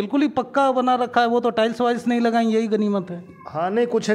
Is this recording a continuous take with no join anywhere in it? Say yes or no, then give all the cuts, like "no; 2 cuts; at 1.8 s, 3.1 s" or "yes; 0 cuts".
yes; 0 cuts